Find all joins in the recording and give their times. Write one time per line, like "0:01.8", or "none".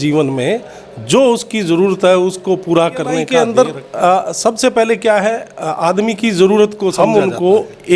0:03.2
0:07.0